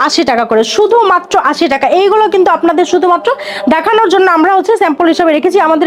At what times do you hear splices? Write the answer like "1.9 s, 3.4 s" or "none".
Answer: none